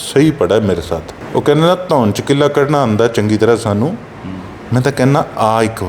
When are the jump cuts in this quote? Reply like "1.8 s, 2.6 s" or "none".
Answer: 1.1 s

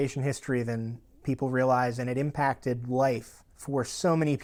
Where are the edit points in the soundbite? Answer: none

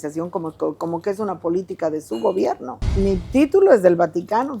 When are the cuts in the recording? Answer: 2.9 s

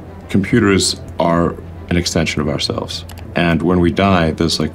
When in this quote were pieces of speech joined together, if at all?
1.0 s, 3.3 s

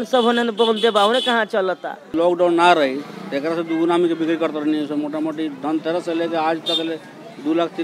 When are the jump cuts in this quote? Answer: 2.1 s

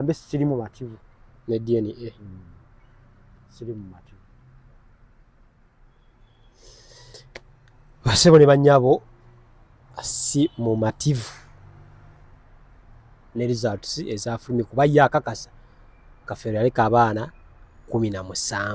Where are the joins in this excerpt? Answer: none

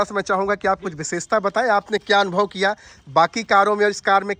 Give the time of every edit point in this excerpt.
none

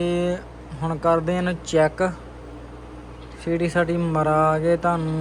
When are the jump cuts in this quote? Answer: none

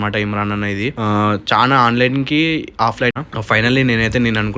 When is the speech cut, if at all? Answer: 3.2 s

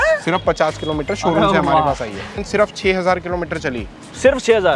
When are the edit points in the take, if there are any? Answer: 2.3 s

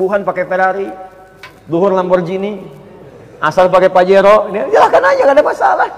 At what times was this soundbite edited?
none

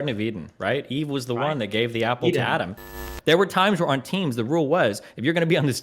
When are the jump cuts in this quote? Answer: 3.0 s

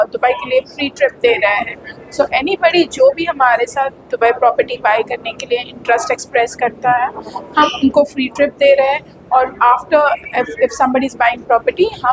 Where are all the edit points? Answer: none

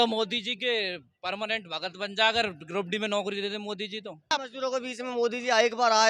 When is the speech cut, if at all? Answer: 4.3 s

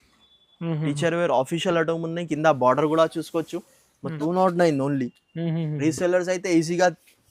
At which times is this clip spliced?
4.1 s

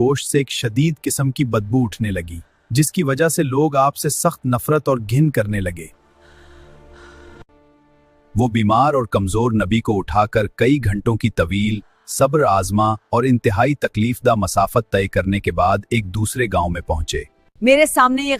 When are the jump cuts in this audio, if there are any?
7.5 s, 17.4 s

